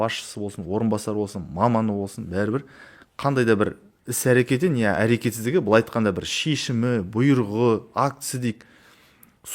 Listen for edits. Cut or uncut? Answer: uncut